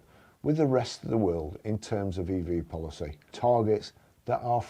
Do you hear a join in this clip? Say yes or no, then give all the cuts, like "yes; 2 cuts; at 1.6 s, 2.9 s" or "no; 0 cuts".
yes; 1 cut; at 3.2 s